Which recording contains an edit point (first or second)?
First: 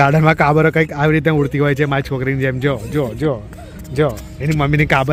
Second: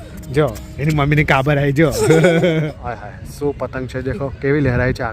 second